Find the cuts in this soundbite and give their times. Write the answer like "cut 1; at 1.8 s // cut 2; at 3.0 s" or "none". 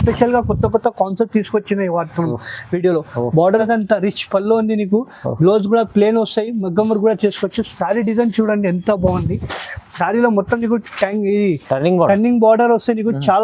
cut 1; at 3.6 s